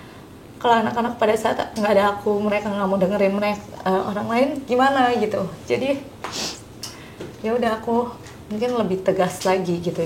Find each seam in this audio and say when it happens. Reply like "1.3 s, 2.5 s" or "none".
none